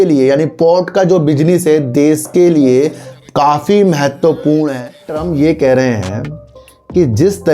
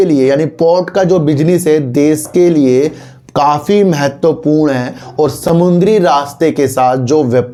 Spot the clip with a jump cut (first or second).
first